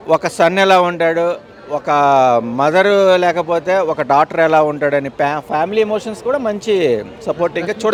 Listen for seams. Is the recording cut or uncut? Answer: uncut